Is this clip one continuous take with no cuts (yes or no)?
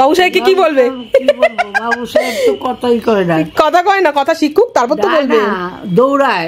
yes